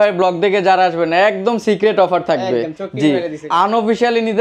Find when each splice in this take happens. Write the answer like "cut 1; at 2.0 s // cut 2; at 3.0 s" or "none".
cut 1; at 3.4 s